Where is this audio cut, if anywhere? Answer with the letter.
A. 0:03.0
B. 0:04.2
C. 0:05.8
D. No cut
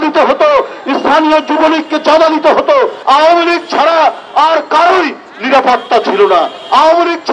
A